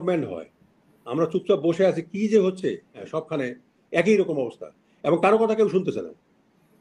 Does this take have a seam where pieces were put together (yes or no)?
yes